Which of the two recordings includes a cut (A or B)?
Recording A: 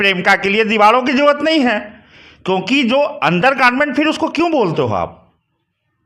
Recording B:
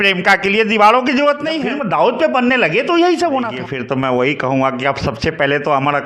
B